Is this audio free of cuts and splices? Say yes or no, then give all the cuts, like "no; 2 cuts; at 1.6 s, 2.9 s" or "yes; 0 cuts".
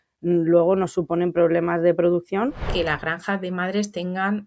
no; 1 cut; at 2.6 s